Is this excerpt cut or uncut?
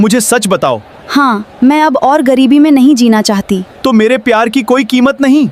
uncut